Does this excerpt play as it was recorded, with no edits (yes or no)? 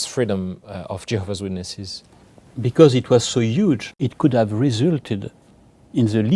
no